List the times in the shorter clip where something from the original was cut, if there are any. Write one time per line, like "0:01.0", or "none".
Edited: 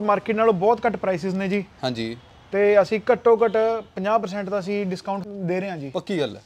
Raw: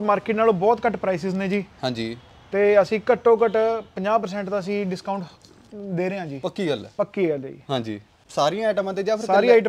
0:05.3